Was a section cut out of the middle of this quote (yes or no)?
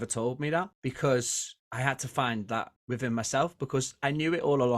no